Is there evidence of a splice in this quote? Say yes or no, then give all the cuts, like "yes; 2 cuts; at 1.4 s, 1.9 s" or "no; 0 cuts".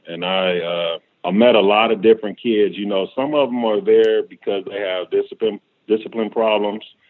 yes; 1 cut; at 1.1 s